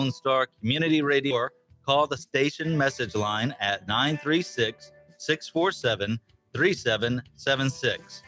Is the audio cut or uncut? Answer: cut